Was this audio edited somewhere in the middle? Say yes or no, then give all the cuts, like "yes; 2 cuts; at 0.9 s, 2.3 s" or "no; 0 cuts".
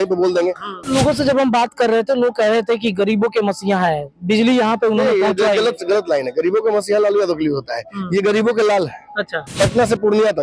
yes; 2 cuts; at 0.8 s, 9.4 s